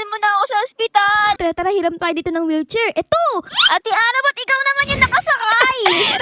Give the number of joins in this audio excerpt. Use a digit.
2